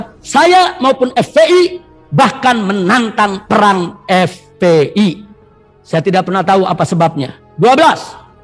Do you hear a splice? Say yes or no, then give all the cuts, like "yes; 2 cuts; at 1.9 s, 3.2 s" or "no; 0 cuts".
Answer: no; 0 cuts